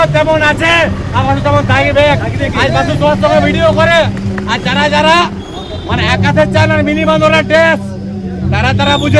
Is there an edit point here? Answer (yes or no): no